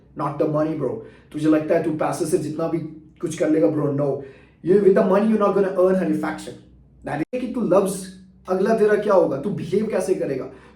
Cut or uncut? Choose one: cut